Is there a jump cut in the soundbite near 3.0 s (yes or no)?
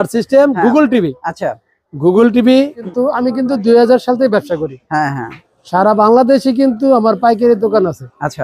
yes